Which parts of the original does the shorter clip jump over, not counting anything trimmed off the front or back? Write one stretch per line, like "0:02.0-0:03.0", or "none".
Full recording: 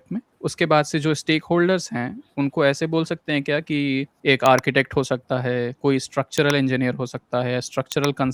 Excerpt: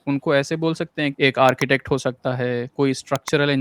0:03.4-0:04.2